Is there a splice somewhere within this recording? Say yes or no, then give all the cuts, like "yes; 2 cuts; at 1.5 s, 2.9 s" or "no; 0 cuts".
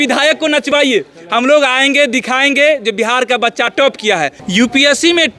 yes; 1 cut; at 4.4 s